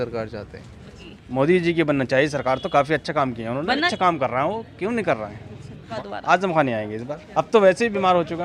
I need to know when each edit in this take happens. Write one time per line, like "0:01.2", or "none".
0:01.1
0:03.9
0:05.9
0:07.1

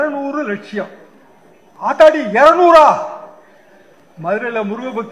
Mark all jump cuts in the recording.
none

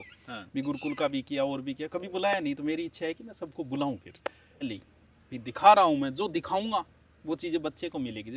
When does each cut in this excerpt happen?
0:04.6

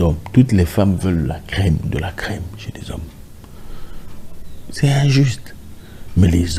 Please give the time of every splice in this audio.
none

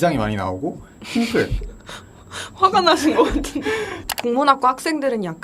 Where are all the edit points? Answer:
0:04.0

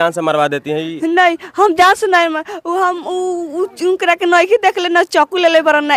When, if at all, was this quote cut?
none

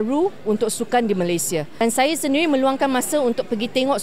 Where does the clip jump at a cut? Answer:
0:01.7

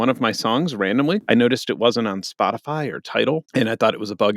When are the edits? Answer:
0:01.2
0:03.5

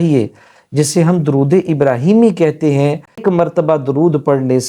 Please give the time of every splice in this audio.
0:03.2

